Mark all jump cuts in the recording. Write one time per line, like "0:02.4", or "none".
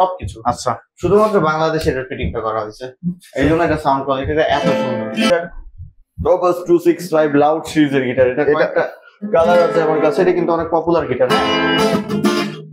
0:05.3